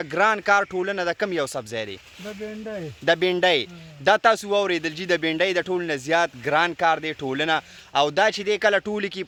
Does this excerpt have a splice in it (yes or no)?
no